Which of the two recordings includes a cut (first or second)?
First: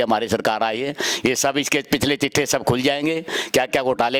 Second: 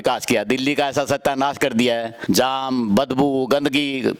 second